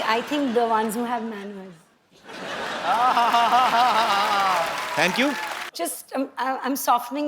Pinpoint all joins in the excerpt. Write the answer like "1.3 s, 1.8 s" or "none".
5.6 s